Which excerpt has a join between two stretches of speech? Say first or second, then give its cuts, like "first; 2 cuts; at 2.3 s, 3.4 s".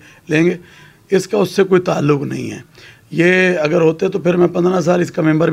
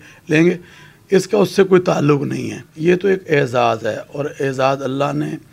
second; 1 cut; at 2.7 s